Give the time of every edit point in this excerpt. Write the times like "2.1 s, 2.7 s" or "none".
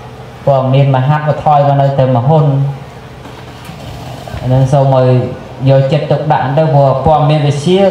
none